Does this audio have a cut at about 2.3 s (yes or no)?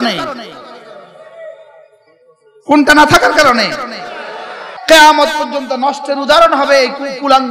no